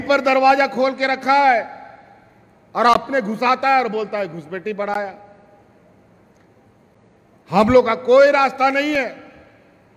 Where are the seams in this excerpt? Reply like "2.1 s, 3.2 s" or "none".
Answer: none